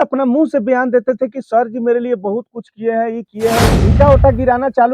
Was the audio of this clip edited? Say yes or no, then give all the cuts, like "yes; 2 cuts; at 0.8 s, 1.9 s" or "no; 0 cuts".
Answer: yes; 1 cut; at 3.8 s